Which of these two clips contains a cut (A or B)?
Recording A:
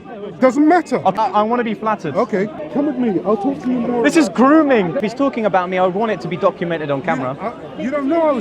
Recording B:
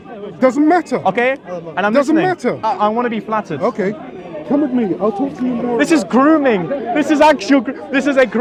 A